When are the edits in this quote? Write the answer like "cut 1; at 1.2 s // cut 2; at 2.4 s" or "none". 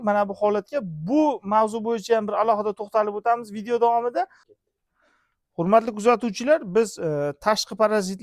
cut 1; at 4.4 s